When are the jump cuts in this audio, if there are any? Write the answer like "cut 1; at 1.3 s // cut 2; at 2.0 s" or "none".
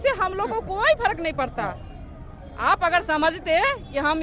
none